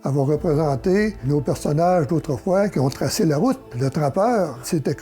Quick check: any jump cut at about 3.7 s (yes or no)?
yes